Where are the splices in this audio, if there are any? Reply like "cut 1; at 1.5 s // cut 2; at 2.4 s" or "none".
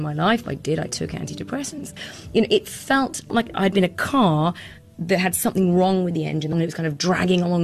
cut 1; at 2.0 s // cut 2; at 6.5 s